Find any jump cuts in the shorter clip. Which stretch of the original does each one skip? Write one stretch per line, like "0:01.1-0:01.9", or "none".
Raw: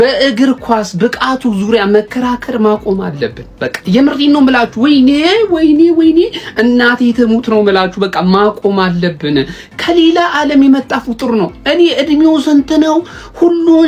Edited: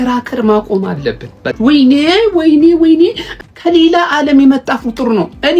0:03.7-0:04.7
0:06.5-0:09.5

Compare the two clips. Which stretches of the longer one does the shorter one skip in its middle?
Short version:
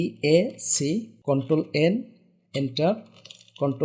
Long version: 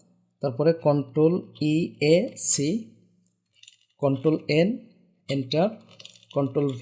0:02.9-0:03.9

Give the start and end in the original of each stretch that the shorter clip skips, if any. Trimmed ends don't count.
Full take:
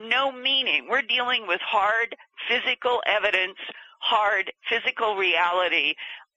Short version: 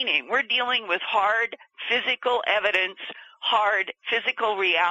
none

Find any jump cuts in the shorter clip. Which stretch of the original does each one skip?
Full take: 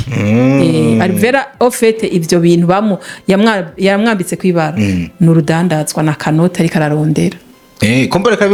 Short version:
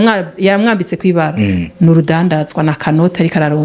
none

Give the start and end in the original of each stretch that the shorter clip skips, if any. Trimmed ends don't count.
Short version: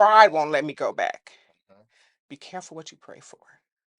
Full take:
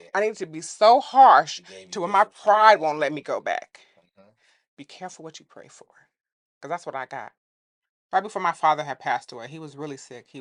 none

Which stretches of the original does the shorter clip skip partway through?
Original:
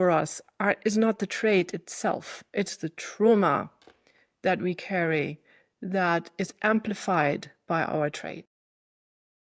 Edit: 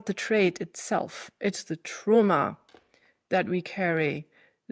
none

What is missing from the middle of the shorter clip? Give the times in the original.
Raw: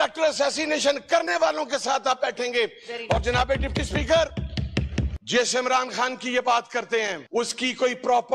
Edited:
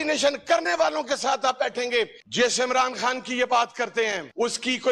0:02.8-0:05.2

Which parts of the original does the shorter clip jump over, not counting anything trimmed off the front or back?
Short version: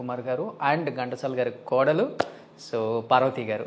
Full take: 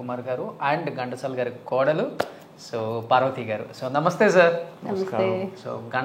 none

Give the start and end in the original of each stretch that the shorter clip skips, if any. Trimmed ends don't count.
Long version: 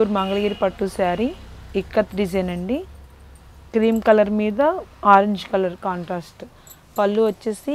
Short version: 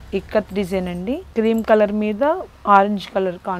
0:02.9-0:03.6

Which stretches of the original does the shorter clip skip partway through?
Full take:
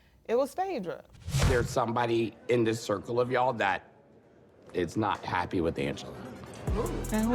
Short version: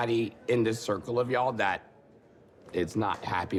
none

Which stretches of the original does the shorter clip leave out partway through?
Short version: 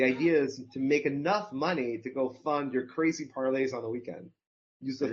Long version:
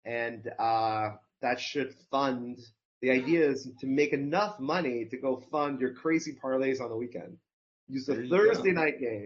none

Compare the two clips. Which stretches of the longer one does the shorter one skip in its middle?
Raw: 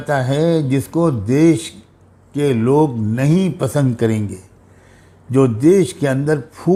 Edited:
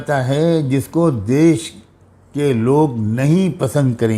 none

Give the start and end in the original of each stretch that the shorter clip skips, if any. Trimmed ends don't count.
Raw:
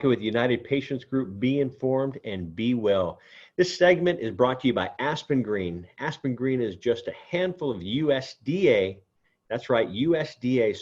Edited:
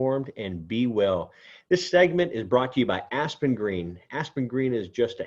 none

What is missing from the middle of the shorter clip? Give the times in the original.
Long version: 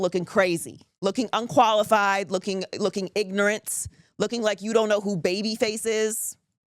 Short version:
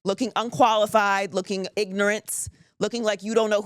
0:02.7-0:03.1

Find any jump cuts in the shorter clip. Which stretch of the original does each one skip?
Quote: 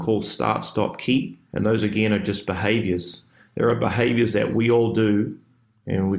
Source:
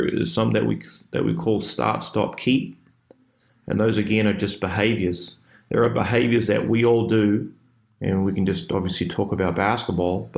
0:02.8-0:03.5

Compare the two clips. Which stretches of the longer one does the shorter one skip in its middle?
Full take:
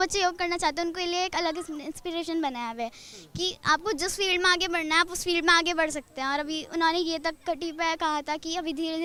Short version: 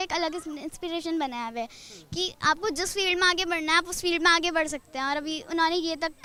none

